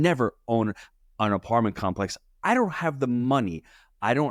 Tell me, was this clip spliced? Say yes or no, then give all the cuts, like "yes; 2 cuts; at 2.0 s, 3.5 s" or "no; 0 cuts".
no; 0 cuts